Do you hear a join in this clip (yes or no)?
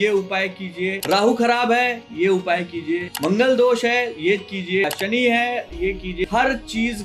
yes